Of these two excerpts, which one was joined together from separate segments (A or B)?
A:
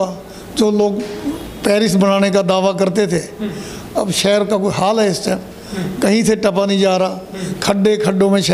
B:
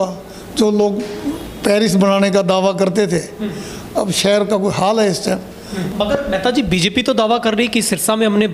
B